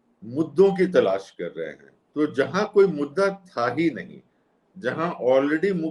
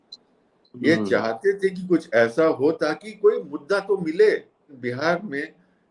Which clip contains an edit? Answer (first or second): second